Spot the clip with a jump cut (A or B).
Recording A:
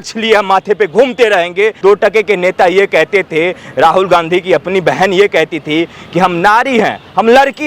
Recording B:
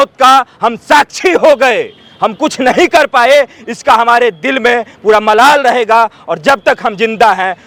A